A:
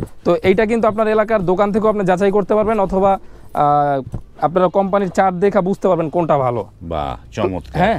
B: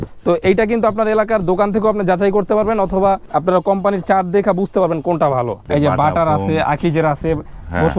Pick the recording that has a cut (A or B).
B